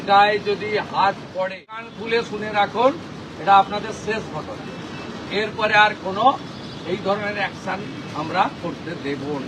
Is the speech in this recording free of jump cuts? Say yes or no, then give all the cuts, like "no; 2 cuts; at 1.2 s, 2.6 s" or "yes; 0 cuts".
no; 1 cut; at 1.9 s